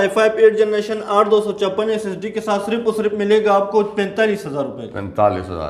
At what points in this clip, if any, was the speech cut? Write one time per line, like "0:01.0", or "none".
none